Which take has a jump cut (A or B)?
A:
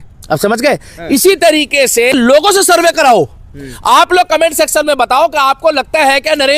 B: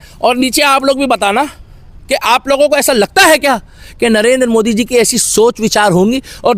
A